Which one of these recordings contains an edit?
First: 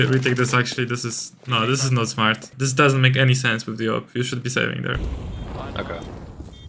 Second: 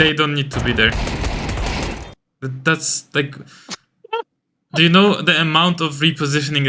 first; 1 cut; at 2.5 s

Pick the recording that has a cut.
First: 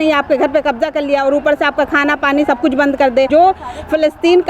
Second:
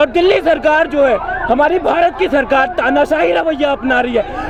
first; 1 cut; at 3.3 s

